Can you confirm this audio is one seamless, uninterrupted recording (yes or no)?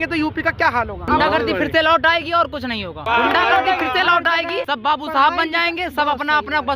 no